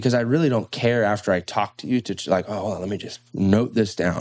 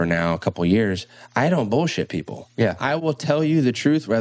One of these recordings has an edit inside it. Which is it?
second; 1 cut; at 3.0 s

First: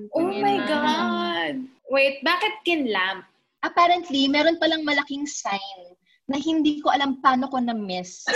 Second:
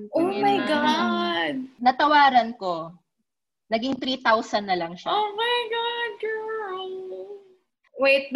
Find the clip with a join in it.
first; 1 cut; at 1.7 s

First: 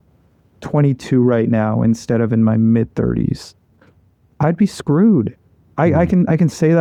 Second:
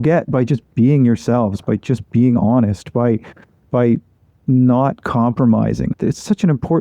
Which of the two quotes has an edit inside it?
second; 1 cut; at 5.9 s

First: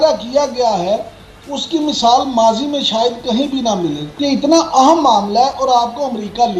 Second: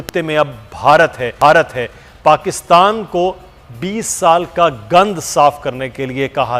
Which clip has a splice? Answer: first; 1 cut; at 4.1 s

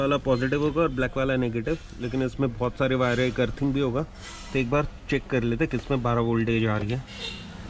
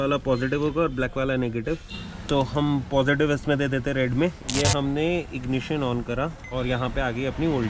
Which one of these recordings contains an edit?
second; 3 cuts; at 1.9 s, 4.4 s, 6.4 s

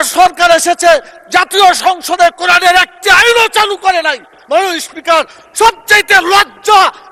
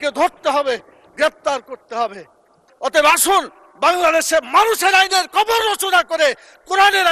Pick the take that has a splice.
second; 1 cut; at 2.6 s

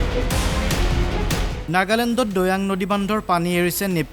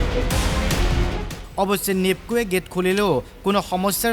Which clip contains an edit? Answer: first; 1 cut; at 1.0 s

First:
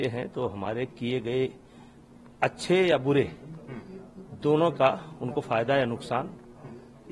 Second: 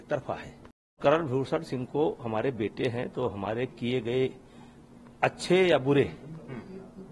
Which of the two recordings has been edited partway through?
second; 1 cut; at 1.0 s

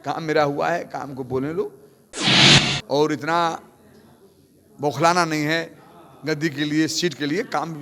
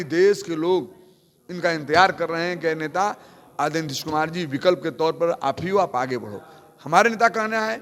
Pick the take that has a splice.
first; 1 cut; at 2.3 s

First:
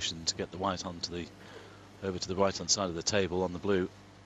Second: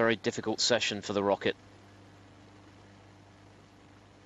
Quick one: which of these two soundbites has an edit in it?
first; 1 cut; at 3.3 s

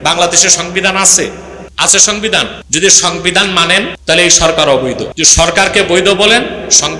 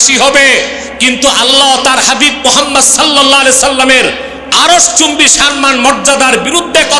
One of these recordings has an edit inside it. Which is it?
first; 3 cuts; at 2.6 s, 4.0 s, 5.1 s

